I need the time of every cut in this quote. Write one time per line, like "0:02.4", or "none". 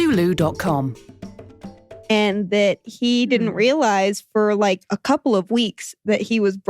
0:02.1